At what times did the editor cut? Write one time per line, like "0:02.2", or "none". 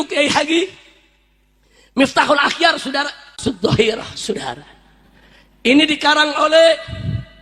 0:03.4